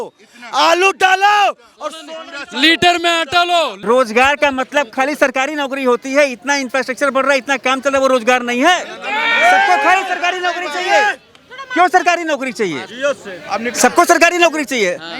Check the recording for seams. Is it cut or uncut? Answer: cut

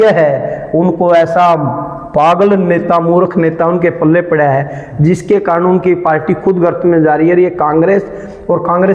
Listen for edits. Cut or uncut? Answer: uncut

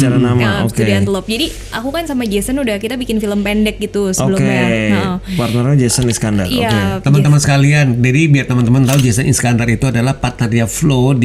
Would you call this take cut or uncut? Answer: uncut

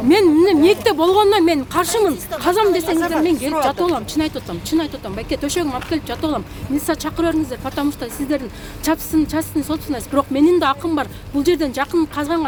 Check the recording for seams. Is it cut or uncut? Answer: uncut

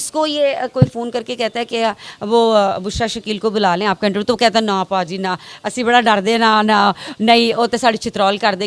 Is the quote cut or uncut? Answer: uncut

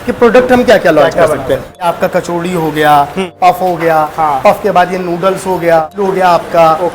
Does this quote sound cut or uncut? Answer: cut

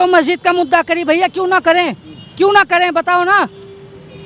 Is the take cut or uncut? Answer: uncut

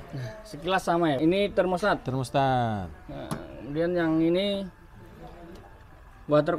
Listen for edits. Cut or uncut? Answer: cut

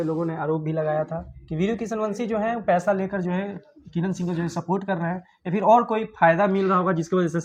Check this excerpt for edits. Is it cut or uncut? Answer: uncut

